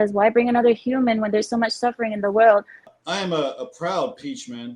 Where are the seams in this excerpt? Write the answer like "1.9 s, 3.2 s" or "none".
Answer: 2.8 s